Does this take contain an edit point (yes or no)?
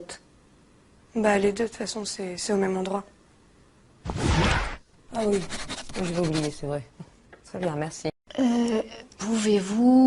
yes